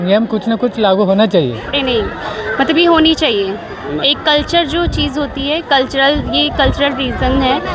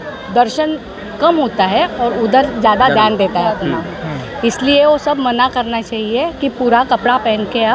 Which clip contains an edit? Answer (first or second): first